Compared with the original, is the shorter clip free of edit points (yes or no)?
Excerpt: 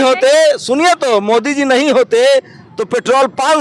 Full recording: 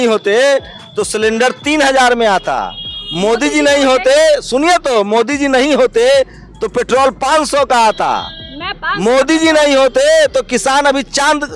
yes